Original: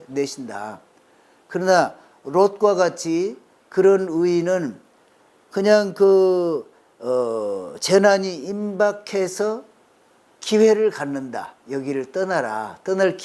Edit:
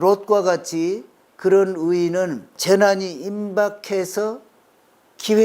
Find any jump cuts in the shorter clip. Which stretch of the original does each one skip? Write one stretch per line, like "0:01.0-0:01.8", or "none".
0:04.8-0:07.7